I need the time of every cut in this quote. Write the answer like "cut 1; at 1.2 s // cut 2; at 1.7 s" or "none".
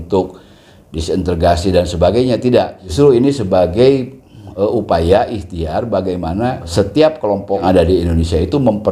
cut 1; at 2.8 s // cut 2; at 6.7 s // cut 3; at 7.6 s

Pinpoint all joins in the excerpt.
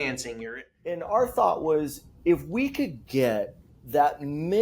cut 1; at 1.0 s

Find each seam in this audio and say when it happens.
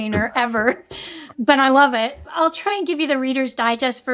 cut 1; at 2.2 s

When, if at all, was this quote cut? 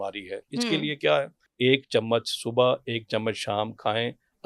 cut 1; at 1.4 s

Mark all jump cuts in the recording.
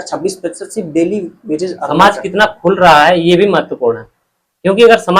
cut 1; at 1.8 s

